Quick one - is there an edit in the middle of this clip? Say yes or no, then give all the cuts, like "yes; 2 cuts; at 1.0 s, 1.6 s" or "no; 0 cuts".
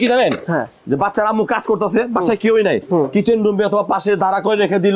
no; 0 cuts